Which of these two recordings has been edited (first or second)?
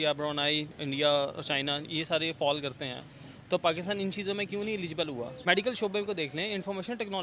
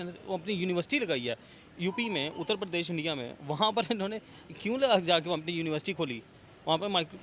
first